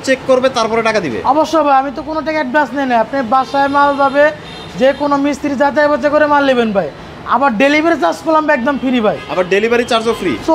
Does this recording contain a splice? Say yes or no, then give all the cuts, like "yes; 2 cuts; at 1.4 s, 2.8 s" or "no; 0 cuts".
no; 0 cuts